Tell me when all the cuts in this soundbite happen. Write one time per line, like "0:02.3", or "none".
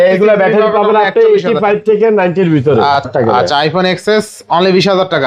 0:03.1